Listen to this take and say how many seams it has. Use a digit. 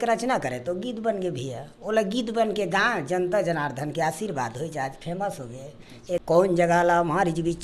1